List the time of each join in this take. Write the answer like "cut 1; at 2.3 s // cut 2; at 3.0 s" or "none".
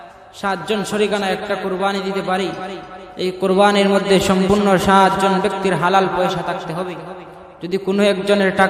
none